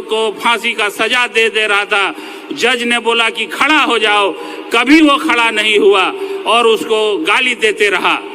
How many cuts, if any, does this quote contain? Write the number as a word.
zero